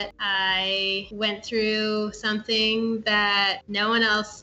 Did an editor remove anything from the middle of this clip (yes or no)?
no